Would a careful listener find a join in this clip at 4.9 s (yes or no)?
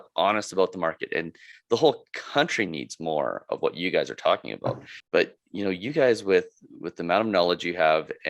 yes